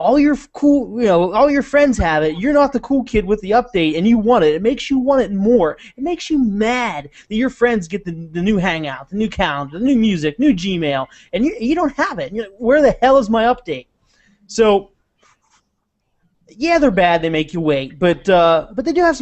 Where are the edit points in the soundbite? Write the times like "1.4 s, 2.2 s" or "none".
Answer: 7.0 s